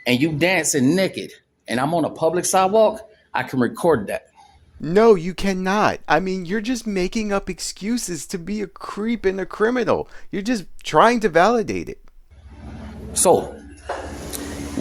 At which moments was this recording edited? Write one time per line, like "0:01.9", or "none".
none